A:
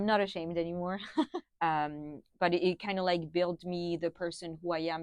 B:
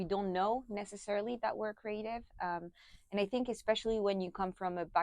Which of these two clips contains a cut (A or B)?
A